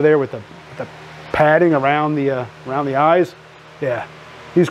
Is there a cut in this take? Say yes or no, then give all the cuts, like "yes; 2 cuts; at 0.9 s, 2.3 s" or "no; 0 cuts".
no; 0 cuts